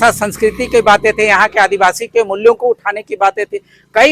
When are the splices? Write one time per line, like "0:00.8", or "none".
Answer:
none